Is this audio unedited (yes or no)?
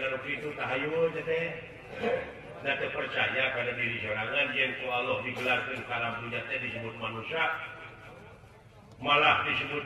no